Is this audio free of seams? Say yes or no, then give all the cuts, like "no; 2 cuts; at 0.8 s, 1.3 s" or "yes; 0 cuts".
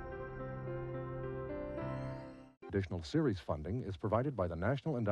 no; 1 cut; at 2.4 s